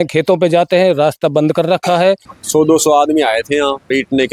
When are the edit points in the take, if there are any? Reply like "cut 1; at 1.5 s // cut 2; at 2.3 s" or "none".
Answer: cut 1; at 2.3 s